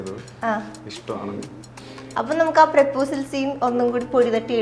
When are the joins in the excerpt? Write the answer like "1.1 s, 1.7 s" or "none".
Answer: 2.1 s